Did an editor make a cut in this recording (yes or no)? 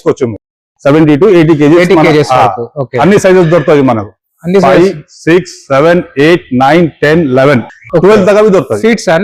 no